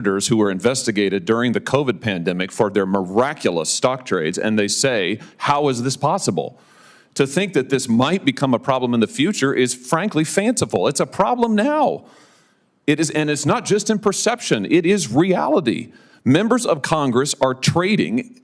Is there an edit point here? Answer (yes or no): no